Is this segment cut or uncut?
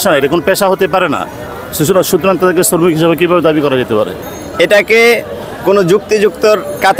uncut